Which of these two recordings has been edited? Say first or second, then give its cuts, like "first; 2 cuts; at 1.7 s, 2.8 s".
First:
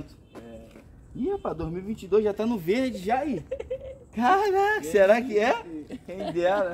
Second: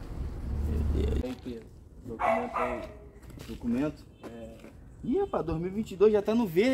second; 1 cut; at 1.2 s